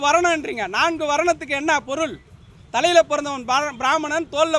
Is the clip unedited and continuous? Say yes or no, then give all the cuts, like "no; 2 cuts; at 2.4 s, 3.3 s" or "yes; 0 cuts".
yes; 0 cuts